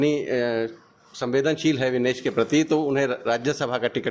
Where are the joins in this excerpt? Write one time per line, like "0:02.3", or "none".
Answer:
none

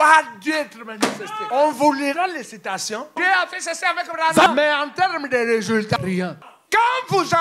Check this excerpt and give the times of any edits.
0:01.3
0:03.2
0:04.5
0:06.0

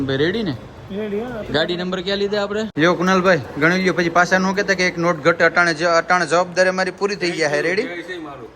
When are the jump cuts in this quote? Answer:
0:02.7

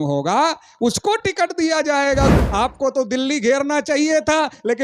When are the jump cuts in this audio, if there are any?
0:02.3

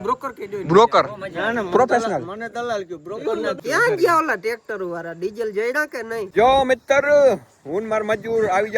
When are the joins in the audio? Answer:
0:03.6
0:06.3

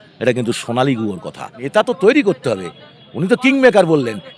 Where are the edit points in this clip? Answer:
0:01.6

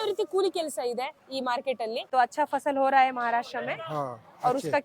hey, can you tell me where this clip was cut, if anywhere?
0:02.0

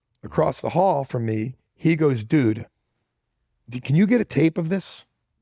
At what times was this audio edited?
0:01.5

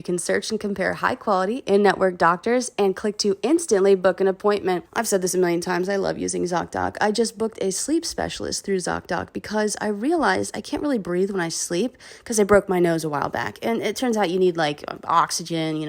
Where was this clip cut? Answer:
0:04.9

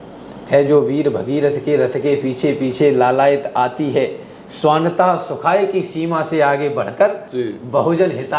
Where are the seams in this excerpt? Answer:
none

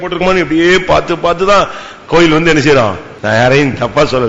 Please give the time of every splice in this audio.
0:03.1

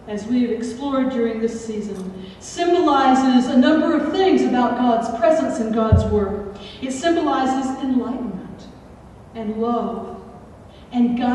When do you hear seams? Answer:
0:01.0

